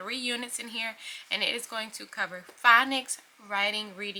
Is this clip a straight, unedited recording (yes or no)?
yes